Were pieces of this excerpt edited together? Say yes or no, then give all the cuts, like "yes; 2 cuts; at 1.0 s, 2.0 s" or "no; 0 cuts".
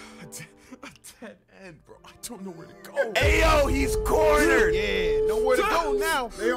no; 0 cuts